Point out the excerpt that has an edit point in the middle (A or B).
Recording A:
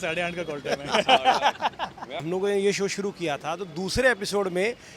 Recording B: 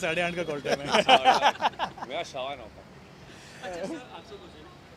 A